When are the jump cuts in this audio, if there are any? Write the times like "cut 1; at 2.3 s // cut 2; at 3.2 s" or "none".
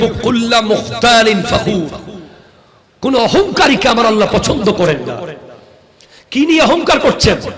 none